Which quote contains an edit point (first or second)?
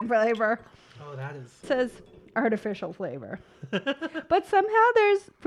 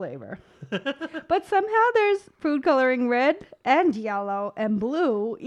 first